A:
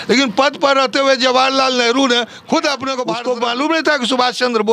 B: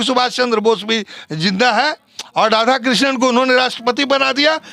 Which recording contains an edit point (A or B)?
A